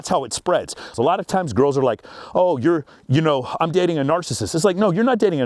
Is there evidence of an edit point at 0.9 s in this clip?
yes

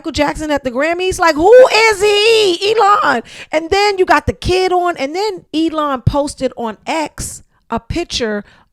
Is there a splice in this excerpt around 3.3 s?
no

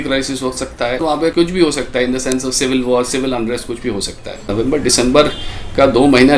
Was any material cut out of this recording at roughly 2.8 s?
no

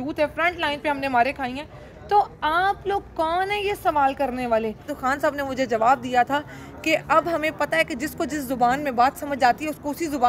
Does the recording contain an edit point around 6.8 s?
no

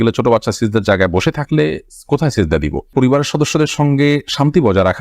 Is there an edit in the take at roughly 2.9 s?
yes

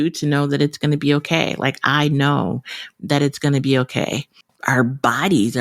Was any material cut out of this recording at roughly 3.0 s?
no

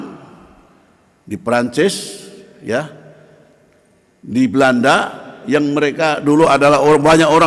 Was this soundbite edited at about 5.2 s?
no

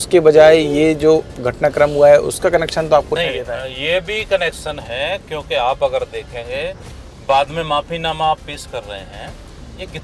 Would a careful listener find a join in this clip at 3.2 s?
yes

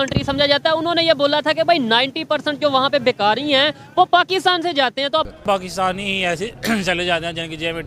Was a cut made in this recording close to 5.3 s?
yes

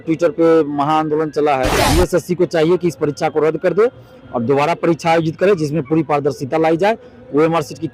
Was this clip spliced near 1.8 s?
yes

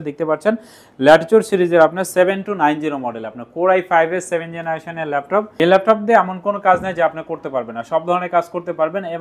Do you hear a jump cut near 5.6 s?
yes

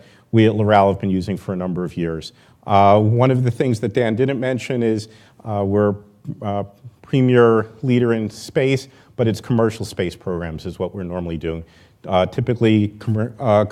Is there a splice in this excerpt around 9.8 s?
yes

